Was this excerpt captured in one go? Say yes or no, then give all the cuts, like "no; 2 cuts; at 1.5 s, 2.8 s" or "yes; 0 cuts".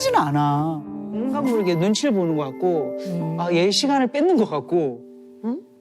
no; 1 cut; at 1.1 s